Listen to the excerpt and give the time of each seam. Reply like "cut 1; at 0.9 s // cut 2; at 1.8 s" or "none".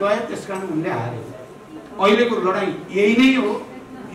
none